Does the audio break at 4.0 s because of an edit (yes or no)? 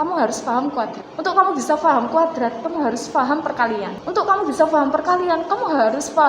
yes